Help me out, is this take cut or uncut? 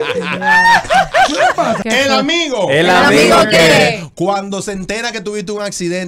cut